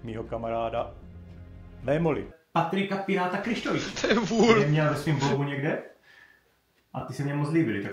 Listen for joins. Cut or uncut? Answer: cut